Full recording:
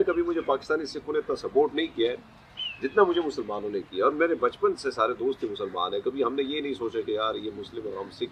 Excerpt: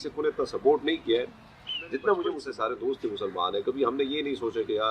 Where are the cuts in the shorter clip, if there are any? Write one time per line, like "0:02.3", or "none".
0:02.5